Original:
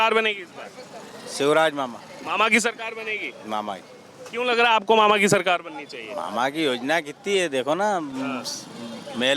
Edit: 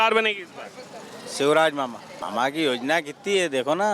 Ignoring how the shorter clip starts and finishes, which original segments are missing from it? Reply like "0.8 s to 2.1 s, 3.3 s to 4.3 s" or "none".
2.1 s to 6.1 s